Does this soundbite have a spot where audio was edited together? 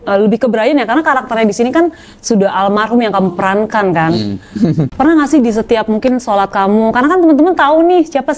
yes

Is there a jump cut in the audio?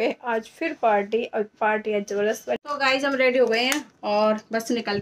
yes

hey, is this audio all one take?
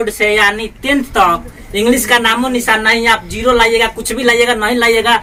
yes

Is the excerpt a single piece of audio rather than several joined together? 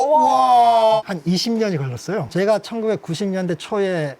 no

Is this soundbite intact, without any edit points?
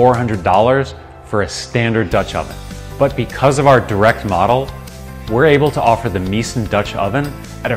yes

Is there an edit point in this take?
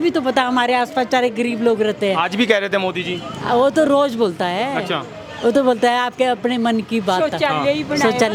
no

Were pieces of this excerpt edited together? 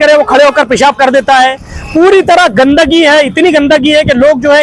no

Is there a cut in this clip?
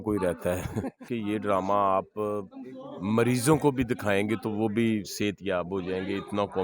yes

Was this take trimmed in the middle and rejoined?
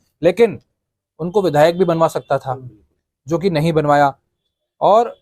no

